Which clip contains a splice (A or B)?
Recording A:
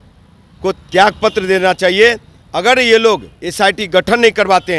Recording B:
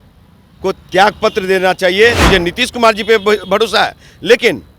B